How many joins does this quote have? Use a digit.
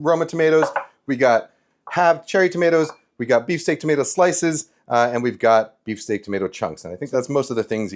1